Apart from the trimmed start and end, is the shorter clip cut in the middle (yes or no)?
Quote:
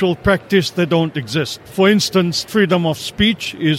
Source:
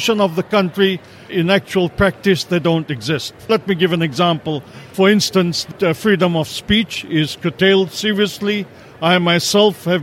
yes